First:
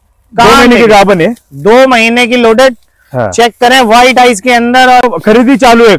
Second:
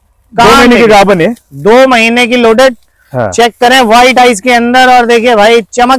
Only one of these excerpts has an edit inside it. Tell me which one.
first; 1 cut; at 5.0 s

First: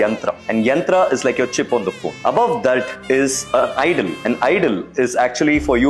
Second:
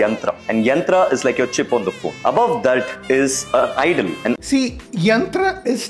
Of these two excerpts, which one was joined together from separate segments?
first; 1 cut; at 4.4 s

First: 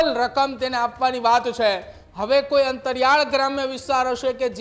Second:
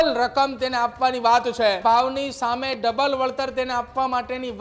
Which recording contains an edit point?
second; 1 cut; at 1.8 s

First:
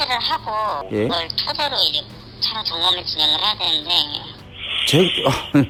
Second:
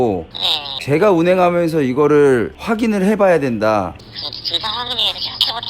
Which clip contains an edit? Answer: second; 1 cut; at 3.9 s

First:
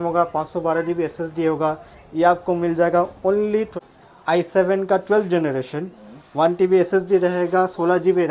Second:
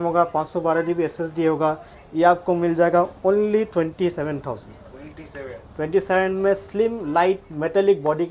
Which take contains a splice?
first; 1 cut; at 3.8 s

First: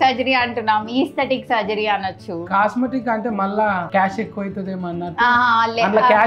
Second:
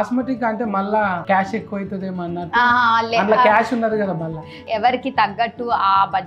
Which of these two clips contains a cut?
second; 1 cut; at 4.6 s

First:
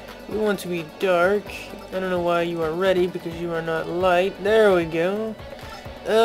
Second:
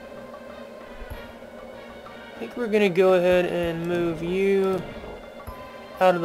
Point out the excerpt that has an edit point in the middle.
first; 1 cut; at 4.9 s

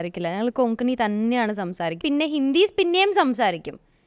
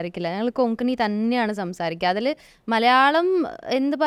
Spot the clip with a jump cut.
first; 1 cut; at 2.0 s

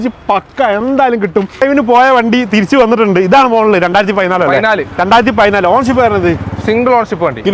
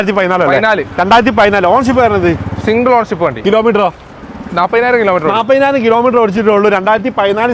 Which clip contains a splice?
first; 1 cut; at 1.6 s

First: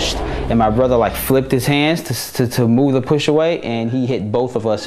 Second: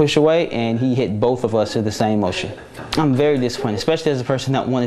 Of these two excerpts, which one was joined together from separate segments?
second; 1 cut; at 2.8 s

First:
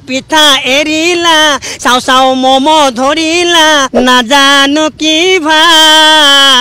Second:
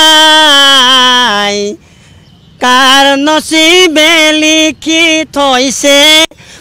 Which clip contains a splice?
first; 1 cut; at 3.9 s

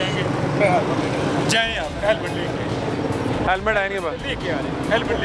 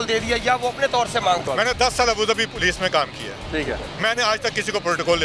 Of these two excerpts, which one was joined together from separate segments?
second; 2 cuts; at 1.4 s, 3.9 s

